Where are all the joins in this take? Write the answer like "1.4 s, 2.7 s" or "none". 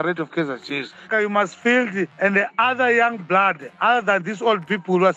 1.1 s, 2.1 s